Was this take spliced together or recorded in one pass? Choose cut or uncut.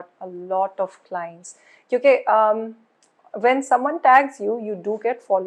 uncut